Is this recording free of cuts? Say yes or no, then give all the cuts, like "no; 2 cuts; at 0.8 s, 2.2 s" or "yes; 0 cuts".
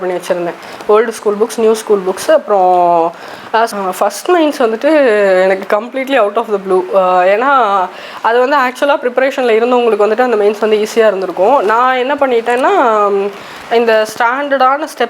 no; 1 cut; at 3.7 s